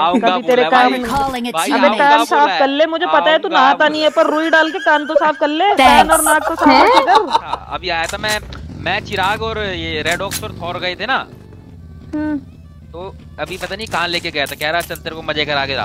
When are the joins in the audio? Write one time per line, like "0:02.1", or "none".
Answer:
0:07.5